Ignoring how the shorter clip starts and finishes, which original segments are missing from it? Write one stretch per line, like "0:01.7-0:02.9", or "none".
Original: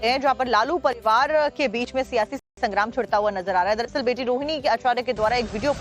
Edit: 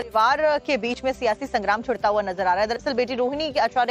0:02.3-0:02.5